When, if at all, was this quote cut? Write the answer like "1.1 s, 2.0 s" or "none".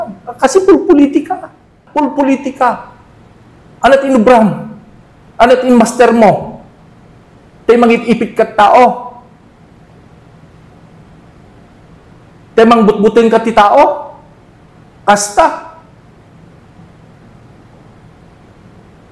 1.8 s

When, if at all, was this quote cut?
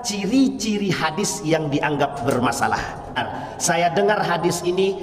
3.2 s

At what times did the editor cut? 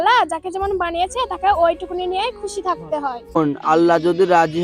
3.4 s

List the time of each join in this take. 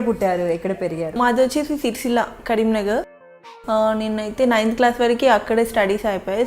1.2 s, 3.2 s

